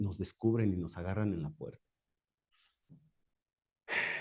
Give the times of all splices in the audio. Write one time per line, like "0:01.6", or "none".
none